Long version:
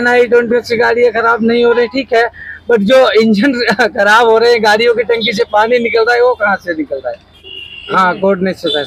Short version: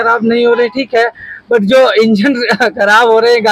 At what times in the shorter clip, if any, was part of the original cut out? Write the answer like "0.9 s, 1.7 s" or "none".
none